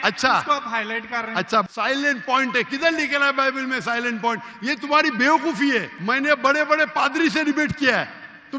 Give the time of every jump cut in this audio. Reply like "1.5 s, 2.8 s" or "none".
1.7 s, 6.0 s